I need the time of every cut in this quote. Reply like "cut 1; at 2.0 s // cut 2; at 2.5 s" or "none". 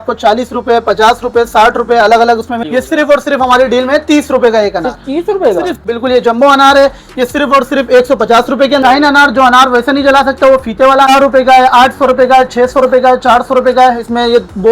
cut 1; at 2.6 s // cut 2; at 5.8 s // cut 3; at 8.8 s // cut 4; at 11.1 s